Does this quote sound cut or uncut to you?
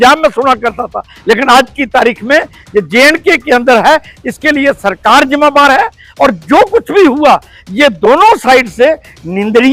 uncut